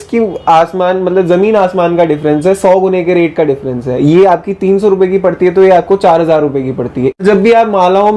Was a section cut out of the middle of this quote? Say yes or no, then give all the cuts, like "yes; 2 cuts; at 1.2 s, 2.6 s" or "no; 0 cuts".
yes; 1 cut; at 7.2 s